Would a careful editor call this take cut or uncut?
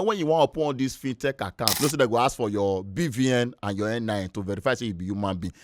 cut